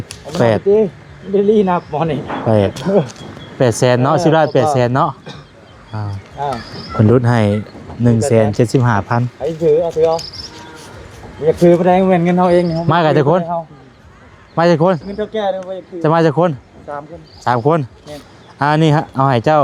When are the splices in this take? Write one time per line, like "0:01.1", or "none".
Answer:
none